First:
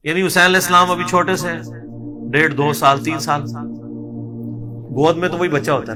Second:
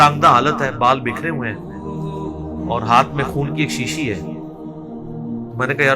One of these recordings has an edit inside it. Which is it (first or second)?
second